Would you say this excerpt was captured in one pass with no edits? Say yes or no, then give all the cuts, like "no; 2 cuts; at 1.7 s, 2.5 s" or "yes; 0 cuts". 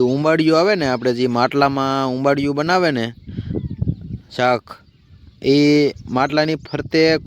yes; 0 cuts